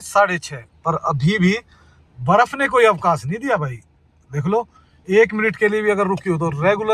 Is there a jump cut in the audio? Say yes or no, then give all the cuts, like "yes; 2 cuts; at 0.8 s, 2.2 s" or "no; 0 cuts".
no; 0 cuts